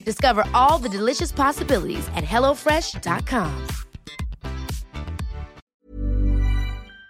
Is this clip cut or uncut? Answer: cut